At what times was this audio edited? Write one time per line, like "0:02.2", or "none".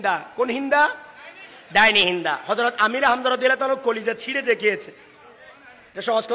none